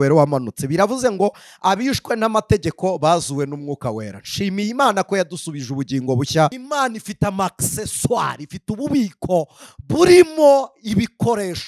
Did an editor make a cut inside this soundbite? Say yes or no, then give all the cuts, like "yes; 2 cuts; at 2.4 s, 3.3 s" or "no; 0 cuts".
yes; 1 cut; at 6.6 s